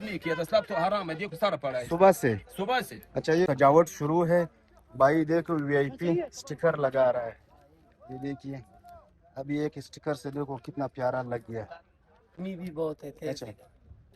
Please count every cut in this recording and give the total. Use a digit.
2